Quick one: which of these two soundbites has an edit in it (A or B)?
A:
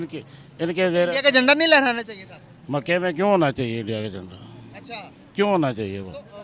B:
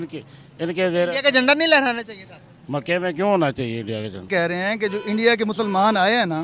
B